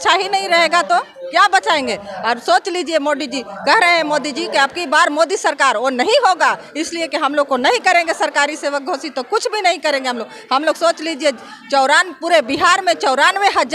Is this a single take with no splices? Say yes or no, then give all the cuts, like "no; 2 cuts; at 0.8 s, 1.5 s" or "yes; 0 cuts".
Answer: yes; 0 cuts